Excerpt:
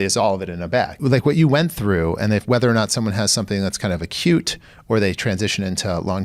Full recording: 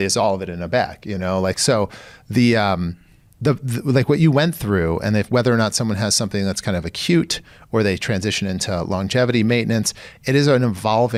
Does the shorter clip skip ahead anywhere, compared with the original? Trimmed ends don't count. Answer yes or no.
yes